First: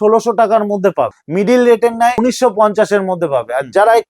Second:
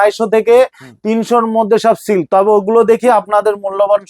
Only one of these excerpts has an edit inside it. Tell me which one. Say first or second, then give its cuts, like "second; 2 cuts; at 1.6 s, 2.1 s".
first; 2 cuts; at 1.2 s, 2.2 s